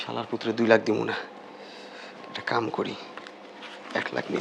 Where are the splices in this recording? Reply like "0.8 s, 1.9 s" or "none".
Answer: none